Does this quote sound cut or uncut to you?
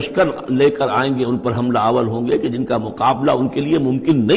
uncut